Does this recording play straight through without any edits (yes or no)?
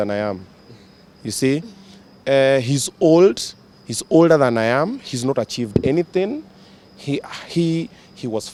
yes